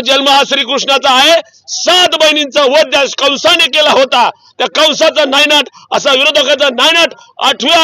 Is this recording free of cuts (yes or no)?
yes